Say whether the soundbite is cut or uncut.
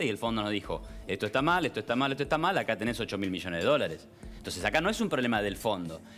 uncut